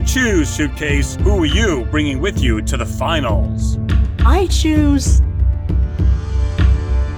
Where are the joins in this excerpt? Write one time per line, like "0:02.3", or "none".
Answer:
none